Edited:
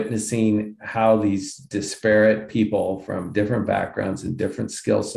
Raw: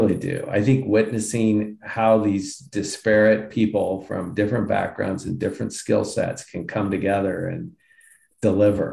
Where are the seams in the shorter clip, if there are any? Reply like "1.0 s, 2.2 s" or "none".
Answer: none